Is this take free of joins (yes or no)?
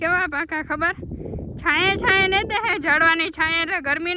yes